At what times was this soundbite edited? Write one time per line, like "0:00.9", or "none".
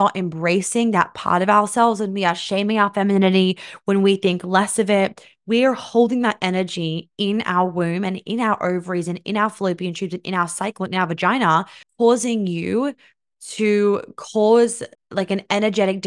0:11.8
0:14.9